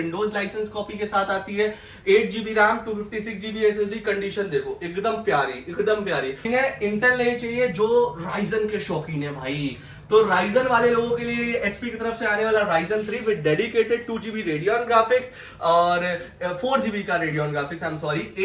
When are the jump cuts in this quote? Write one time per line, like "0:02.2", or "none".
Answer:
0:06.4